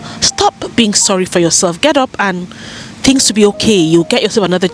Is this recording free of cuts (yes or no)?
yes